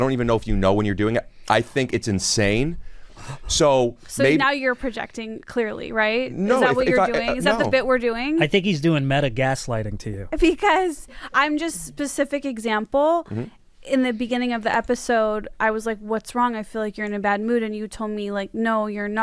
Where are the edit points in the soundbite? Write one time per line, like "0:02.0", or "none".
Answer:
none